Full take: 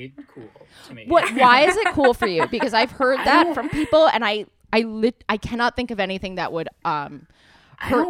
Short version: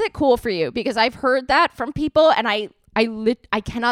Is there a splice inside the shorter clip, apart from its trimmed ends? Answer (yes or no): no